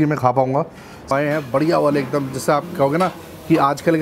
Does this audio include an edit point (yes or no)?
yes